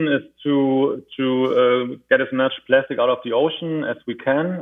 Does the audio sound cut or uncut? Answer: uncut